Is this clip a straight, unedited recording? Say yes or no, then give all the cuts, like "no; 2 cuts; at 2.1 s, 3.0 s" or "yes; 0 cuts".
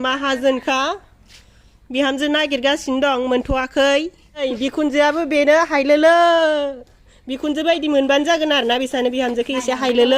no; 1 cut; at 4.5 s